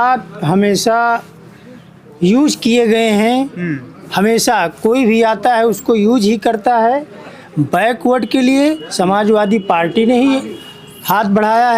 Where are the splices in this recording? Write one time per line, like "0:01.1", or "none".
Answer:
none